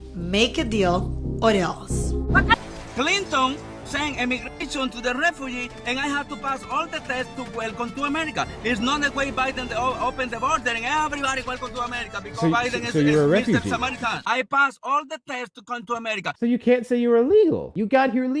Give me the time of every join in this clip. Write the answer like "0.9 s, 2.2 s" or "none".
2.6 s